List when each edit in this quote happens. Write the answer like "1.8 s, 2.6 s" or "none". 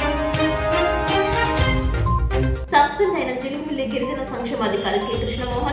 2.6 s